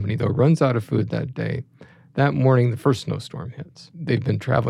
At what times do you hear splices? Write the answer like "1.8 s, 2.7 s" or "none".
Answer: none